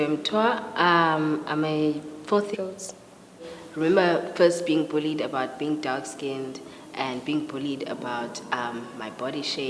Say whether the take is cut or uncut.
uncut